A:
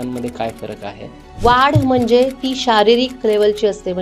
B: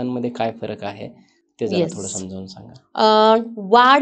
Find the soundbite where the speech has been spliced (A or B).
A